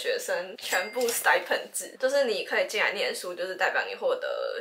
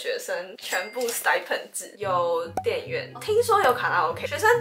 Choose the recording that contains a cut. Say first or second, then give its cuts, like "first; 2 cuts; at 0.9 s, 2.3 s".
second; 1 cut; at 1.8 s